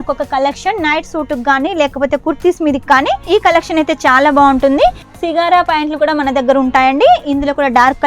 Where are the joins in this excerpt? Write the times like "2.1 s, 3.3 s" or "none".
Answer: 5.1 s